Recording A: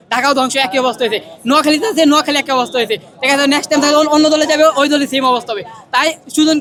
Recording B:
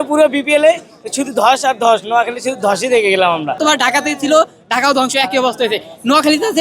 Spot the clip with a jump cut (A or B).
B